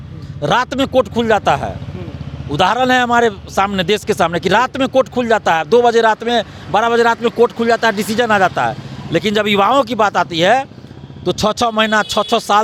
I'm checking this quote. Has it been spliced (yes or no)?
no